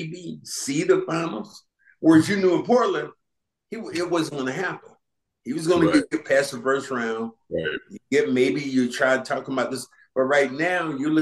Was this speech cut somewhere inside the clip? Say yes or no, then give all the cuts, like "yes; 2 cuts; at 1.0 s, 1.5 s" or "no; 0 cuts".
no; 0 cuts